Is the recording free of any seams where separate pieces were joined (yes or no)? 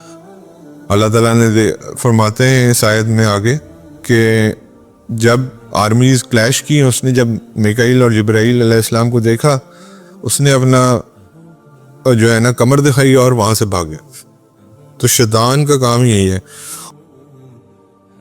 no